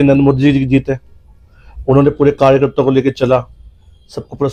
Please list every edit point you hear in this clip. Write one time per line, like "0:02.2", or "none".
none